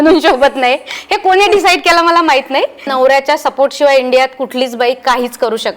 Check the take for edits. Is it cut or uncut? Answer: cut